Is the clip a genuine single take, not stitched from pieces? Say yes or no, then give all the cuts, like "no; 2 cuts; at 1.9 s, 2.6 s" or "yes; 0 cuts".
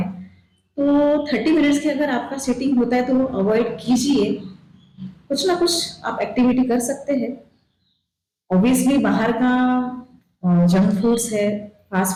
yes; 0 cuts